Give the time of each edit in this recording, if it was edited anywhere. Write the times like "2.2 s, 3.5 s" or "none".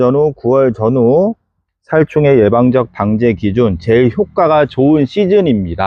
none